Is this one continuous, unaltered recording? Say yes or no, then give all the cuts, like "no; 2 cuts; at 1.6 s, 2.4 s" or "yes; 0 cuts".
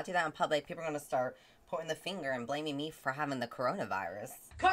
yes; 0 cuts